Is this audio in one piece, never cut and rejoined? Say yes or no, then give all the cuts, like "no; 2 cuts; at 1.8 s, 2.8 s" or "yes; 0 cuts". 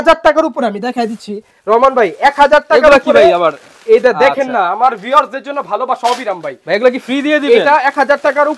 yes; 0 cuts